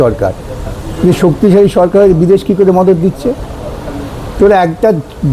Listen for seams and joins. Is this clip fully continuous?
yes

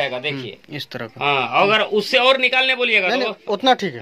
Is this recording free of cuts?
yes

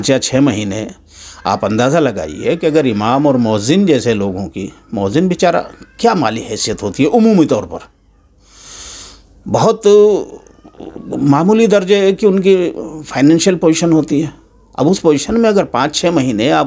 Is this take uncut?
yes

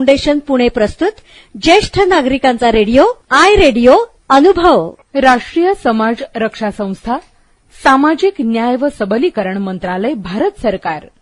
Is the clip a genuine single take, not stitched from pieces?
no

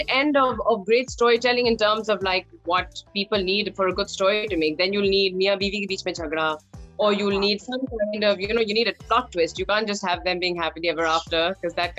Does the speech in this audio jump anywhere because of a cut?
no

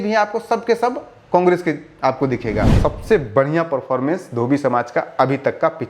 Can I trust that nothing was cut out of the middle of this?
no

